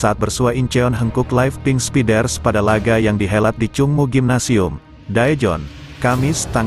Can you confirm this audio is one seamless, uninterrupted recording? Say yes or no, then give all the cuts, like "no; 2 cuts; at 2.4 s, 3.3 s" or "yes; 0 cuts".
yes; 0 cuts